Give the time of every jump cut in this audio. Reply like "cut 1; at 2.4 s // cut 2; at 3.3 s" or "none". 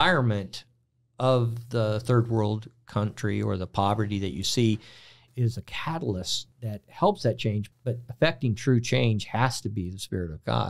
cut 1; at 5.2 s // cut 2; at 6.4 s // cut 3; at 7.6 s